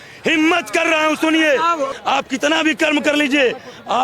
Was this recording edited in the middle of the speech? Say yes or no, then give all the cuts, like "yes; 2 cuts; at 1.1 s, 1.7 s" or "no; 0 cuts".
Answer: yes; 1 cut; at 1.9 s